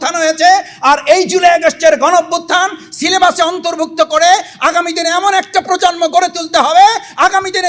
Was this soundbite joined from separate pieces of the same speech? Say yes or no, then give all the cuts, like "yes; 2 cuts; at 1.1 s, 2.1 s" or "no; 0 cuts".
no; 0 cuts